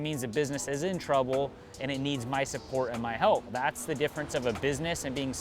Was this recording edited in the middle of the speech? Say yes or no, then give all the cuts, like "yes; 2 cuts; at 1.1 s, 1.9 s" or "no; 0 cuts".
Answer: yes; 1 cut; at 3.5 s